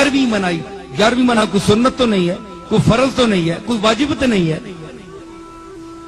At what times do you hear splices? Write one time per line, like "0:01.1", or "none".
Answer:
0:01.4